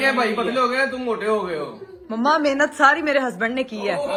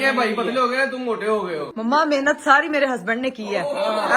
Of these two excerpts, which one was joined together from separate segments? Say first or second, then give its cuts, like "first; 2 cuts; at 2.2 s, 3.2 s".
second; 1 cut; at 1.7 s